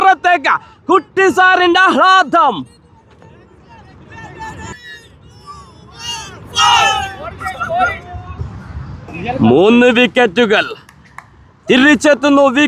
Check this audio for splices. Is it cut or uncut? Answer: cut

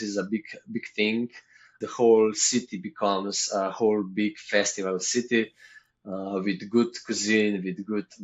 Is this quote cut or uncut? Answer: cut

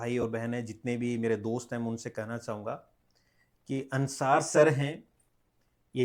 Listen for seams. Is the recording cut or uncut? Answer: uncut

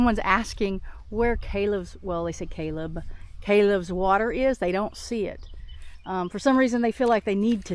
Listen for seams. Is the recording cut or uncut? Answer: uncut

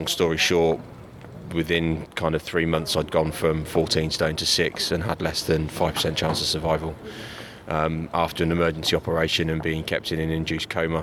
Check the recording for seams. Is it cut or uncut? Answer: uncut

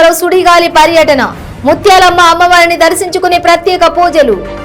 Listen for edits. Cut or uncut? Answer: uncut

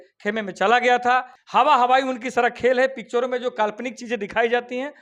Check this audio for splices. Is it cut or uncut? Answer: cut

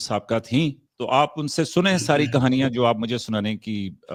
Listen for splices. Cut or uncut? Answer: uncut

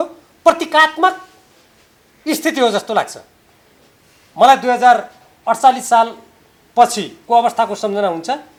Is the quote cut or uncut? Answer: uncut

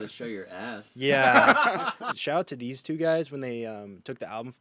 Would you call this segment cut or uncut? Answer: cut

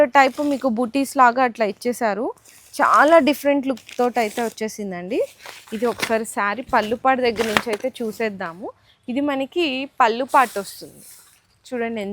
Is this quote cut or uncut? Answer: uncut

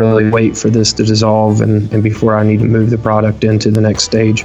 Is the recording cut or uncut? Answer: uncut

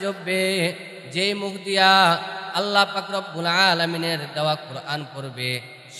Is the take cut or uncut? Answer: uncut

